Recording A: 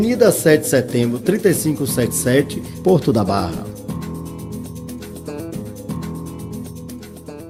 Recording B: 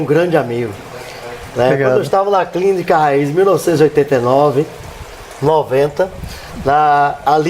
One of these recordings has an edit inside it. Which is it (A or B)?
B